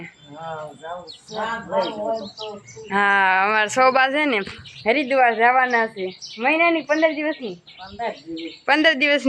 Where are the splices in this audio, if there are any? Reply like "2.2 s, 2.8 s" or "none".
none